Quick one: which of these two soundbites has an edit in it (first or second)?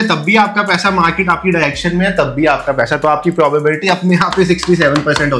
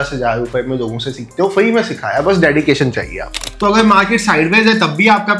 second